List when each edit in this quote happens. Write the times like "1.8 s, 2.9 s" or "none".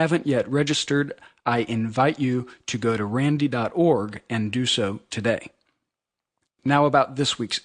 4.2 s